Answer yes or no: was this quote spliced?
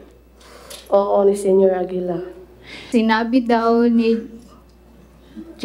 yes